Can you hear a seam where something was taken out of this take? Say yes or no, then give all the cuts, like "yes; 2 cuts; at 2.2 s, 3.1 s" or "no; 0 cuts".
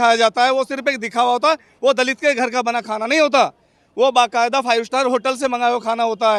no; 0 cuts